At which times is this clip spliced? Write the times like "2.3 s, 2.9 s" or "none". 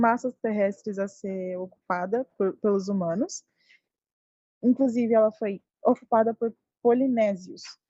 4.2 s